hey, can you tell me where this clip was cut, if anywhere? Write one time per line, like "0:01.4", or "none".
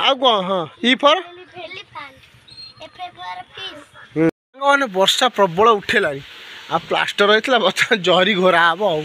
0:04.3